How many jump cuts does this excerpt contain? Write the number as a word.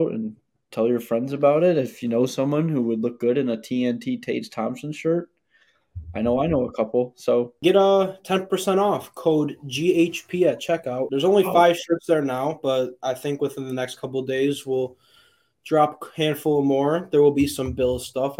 two